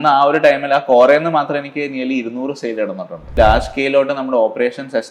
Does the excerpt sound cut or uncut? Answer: cut